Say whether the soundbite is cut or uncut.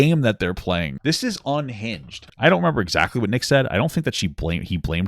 cut